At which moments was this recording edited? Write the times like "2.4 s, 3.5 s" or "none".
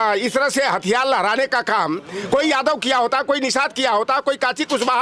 none

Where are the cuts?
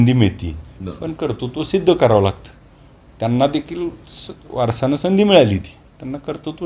none

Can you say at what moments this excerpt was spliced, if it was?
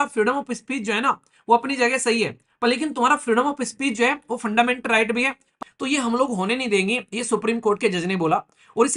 5.5 s

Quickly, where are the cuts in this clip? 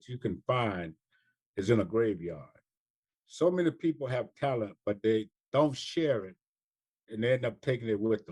none

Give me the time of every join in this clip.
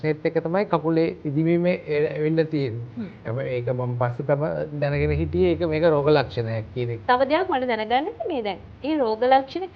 7.0 s

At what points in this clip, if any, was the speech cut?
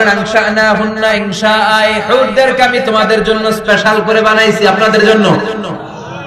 none

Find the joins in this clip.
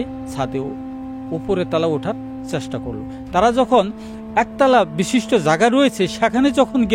none

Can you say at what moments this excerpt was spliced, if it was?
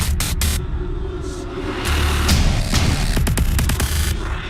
none

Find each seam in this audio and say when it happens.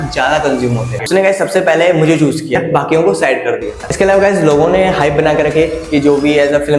0.9 s, 3.8 s

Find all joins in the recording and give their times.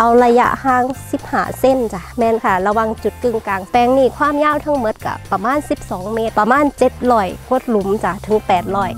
2.0 s, 3.7 s, 6.3 s

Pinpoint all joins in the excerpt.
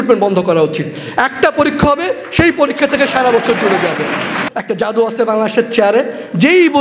4.3 s

